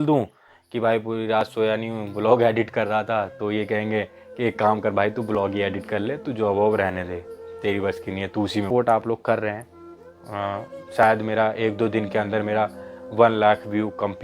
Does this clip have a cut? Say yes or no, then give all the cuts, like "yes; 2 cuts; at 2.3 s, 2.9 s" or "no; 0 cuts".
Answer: yes; 1 cut; at 8.7 s